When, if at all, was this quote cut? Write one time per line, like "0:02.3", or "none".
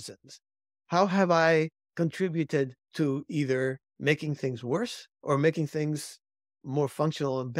0:01.8
0:02.8
0:03.9
0:05.1